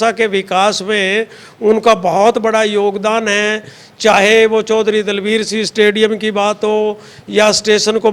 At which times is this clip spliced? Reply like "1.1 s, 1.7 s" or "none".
none